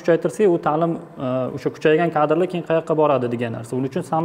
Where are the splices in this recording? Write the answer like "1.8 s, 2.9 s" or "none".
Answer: none